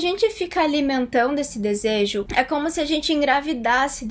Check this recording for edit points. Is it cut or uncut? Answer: cut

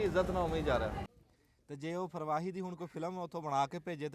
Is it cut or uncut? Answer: cut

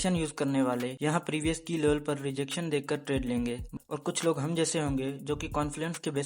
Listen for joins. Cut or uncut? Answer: cut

